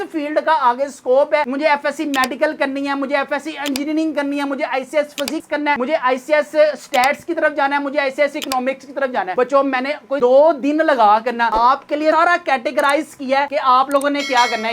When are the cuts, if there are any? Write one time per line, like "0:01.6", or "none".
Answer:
none